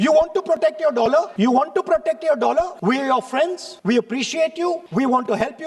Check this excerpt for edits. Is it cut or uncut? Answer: cut